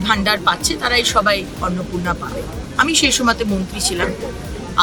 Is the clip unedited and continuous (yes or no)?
yes